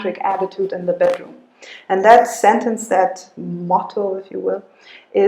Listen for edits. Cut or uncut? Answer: uncut